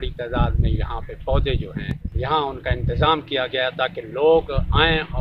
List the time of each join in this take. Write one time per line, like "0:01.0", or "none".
0:02.1